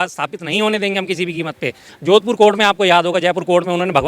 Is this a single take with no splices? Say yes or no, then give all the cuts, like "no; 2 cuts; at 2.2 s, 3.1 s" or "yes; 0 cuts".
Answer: no; 1 cut; at 1.9 s